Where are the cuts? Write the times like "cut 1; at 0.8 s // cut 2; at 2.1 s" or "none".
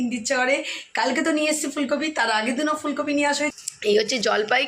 cut 1; at 3.5 s